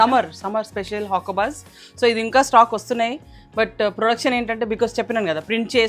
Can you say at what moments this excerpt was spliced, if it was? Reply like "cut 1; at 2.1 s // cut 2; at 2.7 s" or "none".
none

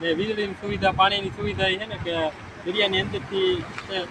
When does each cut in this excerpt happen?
none

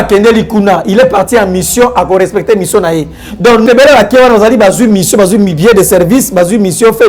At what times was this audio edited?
cut 1; at 3.7 s

